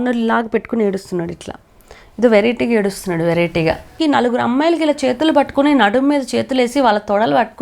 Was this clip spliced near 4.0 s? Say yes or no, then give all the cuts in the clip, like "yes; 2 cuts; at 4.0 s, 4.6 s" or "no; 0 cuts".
yes; 1 cut; at 4.0 s